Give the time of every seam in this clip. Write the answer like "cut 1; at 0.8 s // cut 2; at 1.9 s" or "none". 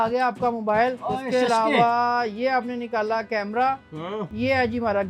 cut 1; at 1.1 s // cut 2; at 4.3 s